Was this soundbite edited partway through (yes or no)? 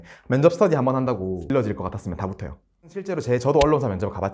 yes